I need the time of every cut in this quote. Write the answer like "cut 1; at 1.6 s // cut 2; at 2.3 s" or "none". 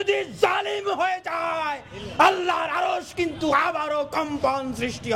none

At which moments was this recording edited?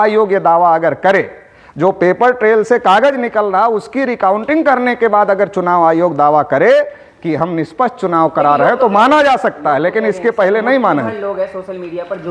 none

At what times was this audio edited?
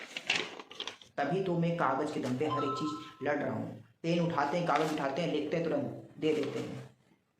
cut 1; at 1.0 s

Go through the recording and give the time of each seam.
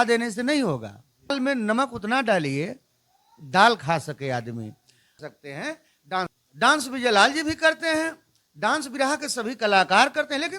cut 1; at 1.3 s // cut 2; at 5.1 s

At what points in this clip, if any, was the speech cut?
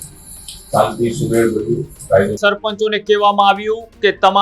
cut 1; at 2.4 s

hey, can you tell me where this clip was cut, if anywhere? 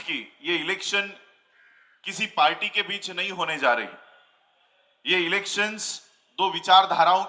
none

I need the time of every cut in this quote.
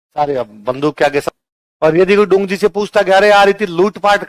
cut 1; at 1.2 s

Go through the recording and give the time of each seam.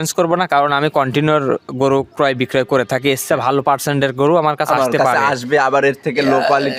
none

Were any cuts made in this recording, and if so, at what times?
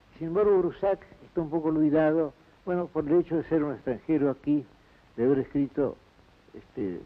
cut 1; at 2.9 s

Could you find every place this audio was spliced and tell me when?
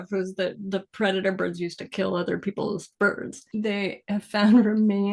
cut 1; at 3.3 s

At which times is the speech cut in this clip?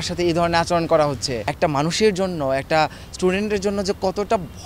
cut 1; at 1.4 s

